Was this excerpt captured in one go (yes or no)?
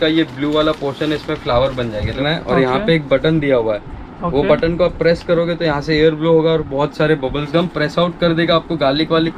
no